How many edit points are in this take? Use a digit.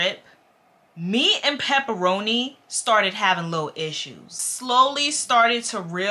1